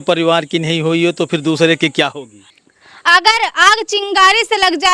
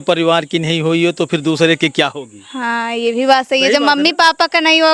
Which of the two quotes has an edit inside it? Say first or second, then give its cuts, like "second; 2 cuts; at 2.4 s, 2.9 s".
first; 1 cut; at 2.4 s